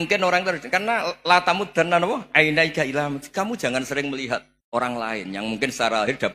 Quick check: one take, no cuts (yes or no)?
no